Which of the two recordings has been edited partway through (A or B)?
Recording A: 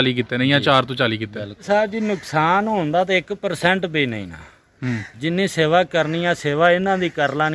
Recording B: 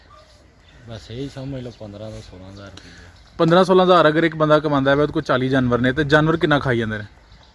A